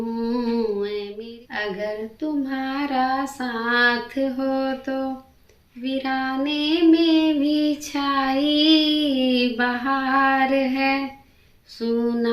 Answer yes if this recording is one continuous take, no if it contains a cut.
no